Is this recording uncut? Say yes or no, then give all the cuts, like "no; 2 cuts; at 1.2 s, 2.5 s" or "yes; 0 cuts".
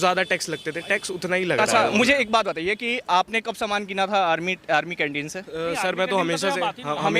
no; 1 cut; at 1.6 s